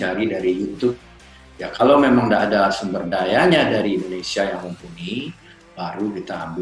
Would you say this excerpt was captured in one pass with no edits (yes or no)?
no